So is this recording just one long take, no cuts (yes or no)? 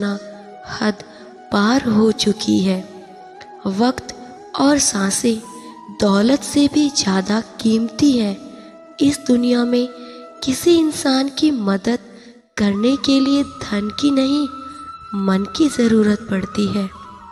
yes